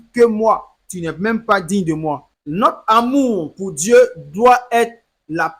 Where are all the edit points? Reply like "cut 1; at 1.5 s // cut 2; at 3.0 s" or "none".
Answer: cut 1; at 2.3 s